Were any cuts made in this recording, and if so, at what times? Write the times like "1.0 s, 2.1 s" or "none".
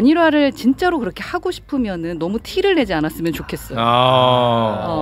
none